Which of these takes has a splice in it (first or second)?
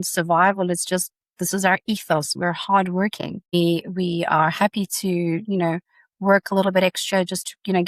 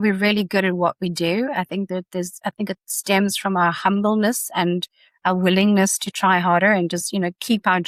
first